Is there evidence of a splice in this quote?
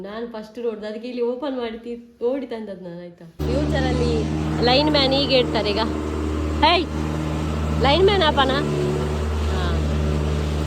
yes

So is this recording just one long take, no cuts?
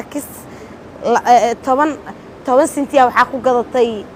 yes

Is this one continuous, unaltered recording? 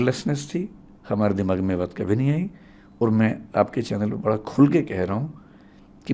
yes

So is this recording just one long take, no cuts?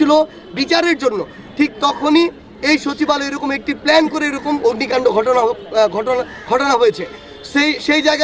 yes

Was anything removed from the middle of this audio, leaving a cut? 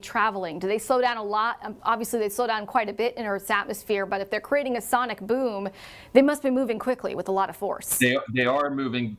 no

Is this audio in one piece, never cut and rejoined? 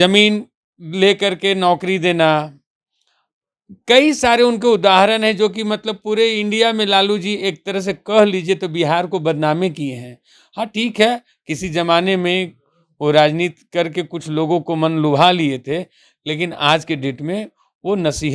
yes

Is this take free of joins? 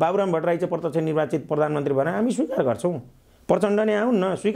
yes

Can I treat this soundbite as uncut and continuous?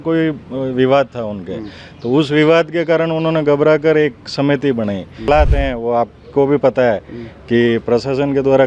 no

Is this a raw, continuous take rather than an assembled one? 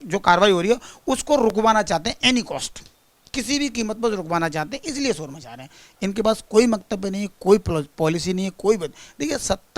yes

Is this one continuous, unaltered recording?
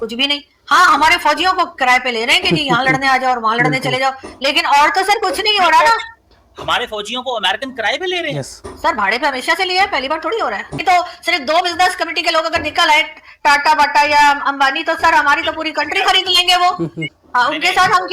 no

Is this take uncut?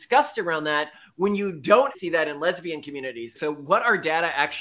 no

